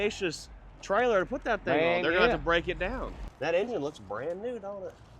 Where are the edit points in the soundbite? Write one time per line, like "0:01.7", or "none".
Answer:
0:03.2